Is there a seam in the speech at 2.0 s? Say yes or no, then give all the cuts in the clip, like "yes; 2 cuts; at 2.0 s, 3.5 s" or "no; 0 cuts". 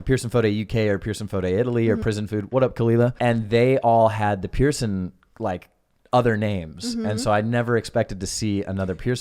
yes; 2 cuts; at 2.0 s, 3.2 s